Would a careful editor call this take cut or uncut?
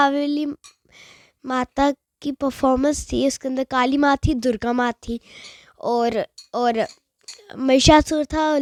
uncut